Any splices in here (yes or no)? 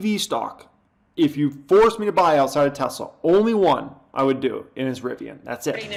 no